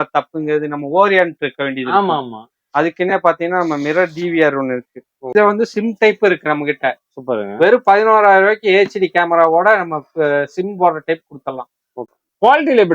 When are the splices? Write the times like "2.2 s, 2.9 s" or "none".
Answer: 5.3 s, 11.9 s